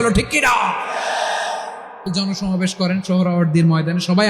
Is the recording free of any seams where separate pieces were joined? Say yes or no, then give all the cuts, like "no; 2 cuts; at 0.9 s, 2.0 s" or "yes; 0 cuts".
no; 1 cut; at 2.1 s